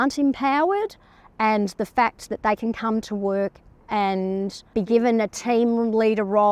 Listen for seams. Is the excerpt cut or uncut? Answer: uncut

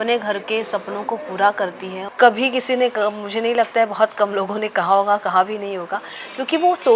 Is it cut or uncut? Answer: cut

